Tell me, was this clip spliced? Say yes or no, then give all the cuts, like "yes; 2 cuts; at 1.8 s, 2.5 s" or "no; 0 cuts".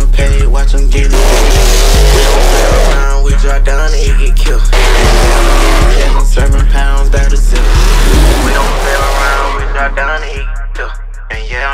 no; 0 cuts